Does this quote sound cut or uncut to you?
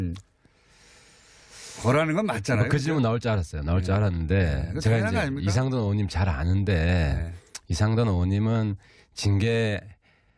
cut